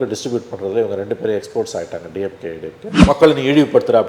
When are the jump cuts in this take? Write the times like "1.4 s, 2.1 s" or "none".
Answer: 2.9 s